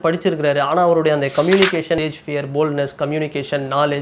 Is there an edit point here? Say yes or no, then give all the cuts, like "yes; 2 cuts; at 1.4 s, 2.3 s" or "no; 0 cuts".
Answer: yes; 1 cut; at 2.0 s